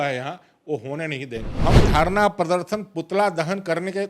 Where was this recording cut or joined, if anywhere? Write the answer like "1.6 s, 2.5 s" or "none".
1.5 s